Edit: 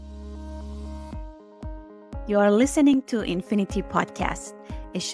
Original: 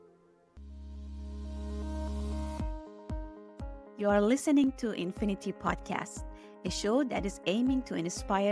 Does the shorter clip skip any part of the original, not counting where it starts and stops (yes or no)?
yes